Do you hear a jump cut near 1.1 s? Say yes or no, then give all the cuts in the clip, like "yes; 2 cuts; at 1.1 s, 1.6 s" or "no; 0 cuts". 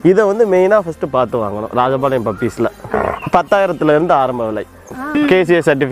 no; 2 cuts; at 2.8 s, 5.0 s